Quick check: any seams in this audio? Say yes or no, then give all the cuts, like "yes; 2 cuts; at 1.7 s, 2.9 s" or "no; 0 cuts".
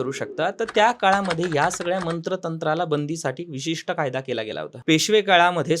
yes; 1 cut; at 4.7 s